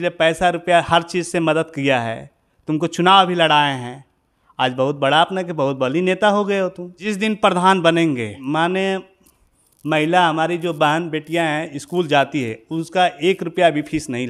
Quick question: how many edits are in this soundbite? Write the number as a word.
two